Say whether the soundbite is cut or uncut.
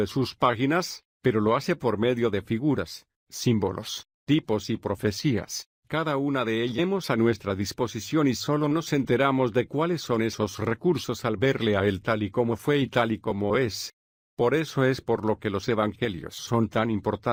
uncut